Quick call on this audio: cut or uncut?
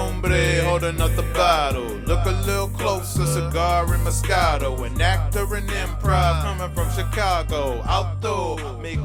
uncut